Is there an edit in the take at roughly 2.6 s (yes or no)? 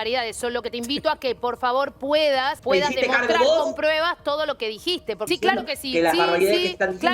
yes